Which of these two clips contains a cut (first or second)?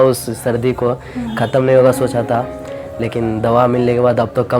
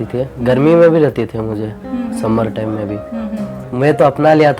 second